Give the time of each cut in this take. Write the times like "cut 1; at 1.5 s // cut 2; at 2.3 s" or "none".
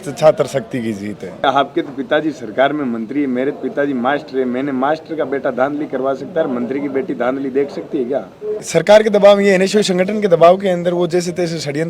cut 1; at 1.4 s // cut 2; at 8.6 s